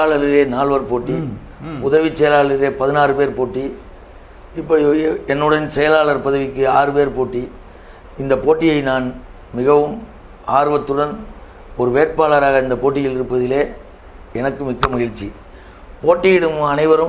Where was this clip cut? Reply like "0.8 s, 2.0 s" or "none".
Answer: none